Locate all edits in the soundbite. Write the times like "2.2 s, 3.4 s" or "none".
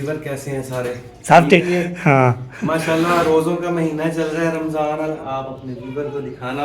1.6 s, 5.2 s